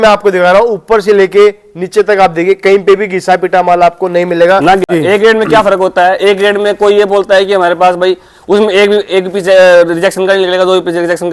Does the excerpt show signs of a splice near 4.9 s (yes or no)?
yes